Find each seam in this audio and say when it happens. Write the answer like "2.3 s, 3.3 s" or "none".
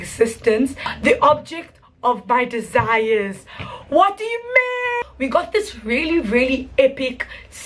5.0 s